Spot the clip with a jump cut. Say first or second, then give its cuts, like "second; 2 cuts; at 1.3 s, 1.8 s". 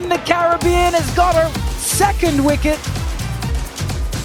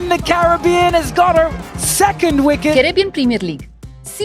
second; 1 cut; at 2.7 s